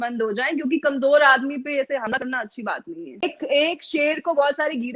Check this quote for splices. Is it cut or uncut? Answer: cut